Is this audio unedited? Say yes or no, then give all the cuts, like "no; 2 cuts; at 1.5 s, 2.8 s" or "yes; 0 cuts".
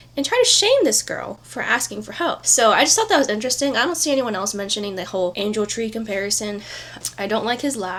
yes; 0 cuts